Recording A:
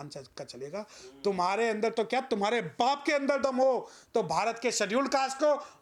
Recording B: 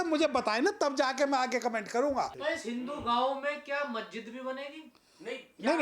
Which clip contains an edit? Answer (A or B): B